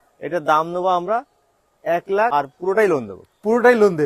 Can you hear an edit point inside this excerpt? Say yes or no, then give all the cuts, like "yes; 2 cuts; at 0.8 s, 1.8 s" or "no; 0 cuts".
yes; 1 cut; at 2.3 s